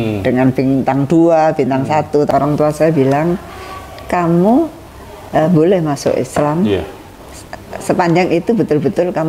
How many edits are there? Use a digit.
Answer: 1